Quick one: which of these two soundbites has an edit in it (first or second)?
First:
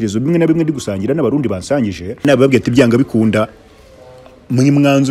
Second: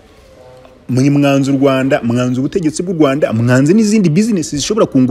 first